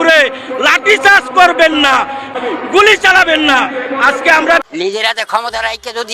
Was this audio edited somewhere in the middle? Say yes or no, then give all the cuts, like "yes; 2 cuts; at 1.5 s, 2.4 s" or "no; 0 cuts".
yes; 1 cut; at 4.6 s